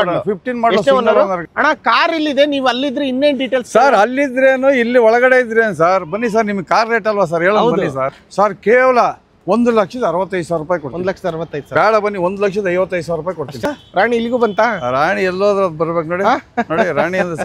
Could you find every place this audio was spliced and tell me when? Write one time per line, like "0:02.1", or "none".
0:01.4
0:08.2
0:13.7